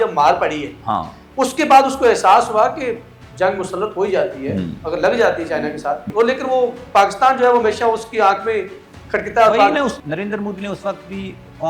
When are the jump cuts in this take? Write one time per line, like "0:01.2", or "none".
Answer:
0:03.2
0:06.0
0:10.0